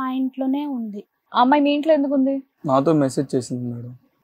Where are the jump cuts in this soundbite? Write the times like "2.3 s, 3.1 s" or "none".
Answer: 2.5 s